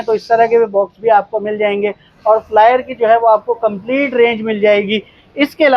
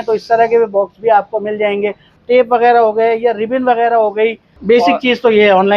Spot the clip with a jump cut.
second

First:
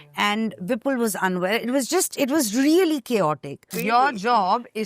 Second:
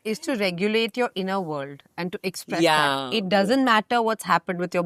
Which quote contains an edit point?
first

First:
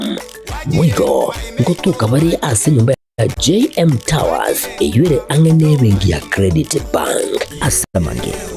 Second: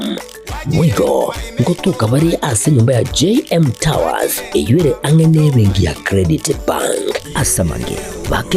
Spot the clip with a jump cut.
second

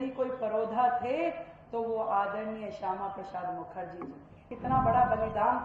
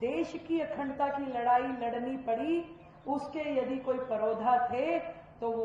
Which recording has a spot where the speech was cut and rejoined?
first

